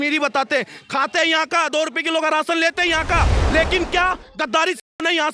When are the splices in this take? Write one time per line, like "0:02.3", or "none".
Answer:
none